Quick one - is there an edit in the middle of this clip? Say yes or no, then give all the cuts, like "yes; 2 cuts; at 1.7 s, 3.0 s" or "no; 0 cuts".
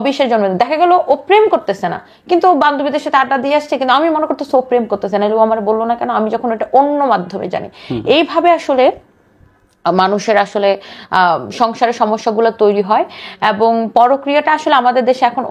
no; 0 cuts